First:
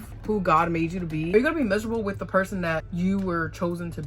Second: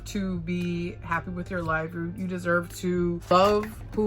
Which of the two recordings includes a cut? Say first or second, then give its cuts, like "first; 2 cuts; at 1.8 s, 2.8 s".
first; 1 cut; at 1.3 s